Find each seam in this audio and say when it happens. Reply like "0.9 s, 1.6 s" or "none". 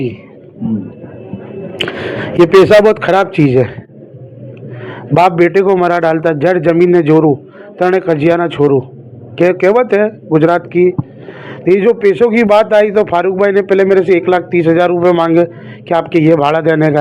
none